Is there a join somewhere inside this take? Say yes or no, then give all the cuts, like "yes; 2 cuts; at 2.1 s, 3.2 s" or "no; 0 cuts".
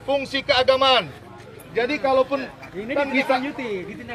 no; 0 cuts